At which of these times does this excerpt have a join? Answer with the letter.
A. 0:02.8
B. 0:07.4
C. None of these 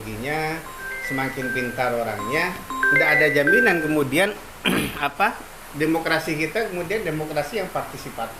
C